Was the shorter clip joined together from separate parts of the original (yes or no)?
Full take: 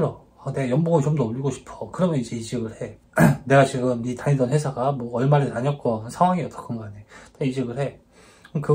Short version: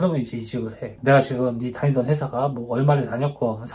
yes